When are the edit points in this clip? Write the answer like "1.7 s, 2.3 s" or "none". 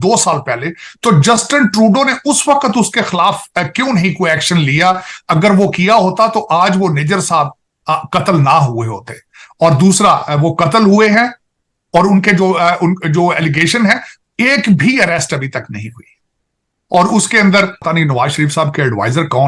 17.8 s